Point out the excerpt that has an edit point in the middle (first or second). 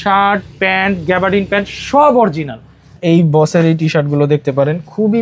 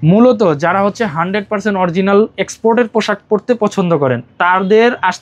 first